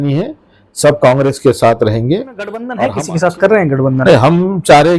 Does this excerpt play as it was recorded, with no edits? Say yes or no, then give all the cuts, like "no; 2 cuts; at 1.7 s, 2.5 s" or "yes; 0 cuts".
no; 1 cut; at 2.7 s